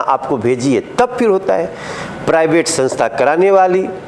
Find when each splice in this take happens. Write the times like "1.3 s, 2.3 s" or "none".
none